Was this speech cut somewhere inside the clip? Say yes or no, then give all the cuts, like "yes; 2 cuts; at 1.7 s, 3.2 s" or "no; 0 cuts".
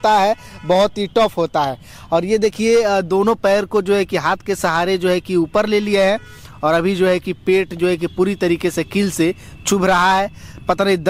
no; 0 cuts